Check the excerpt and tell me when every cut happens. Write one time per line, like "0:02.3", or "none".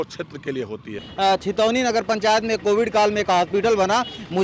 0:01.0